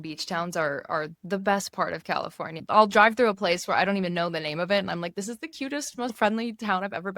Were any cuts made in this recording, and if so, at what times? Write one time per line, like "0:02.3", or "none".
0:02.6
0:06.2